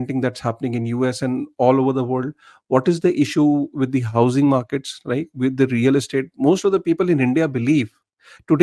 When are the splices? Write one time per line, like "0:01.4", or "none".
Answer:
none